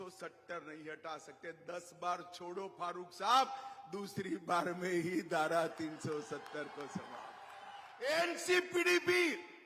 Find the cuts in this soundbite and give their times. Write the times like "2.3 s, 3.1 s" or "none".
8.1 s